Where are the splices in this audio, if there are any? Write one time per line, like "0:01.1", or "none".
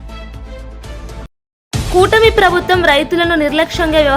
0:01.2